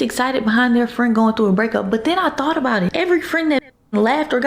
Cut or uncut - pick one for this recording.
cut